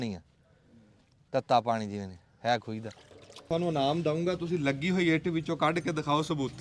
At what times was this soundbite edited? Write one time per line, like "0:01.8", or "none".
0:03.4